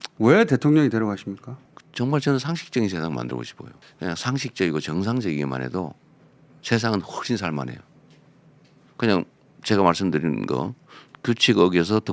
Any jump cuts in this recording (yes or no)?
no